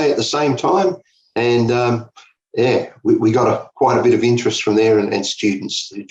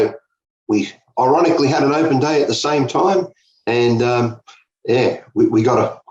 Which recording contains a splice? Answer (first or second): second